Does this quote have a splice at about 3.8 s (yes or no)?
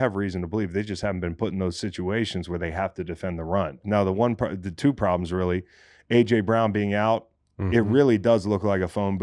yes